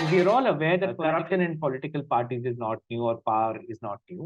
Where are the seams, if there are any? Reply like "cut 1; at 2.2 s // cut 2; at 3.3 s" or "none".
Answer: cut 1; at 1.0 s